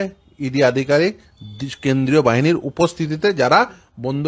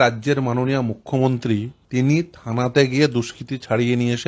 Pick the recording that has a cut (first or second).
second